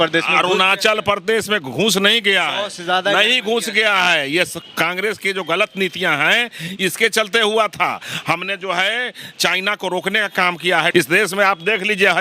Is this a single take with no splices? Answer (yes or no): no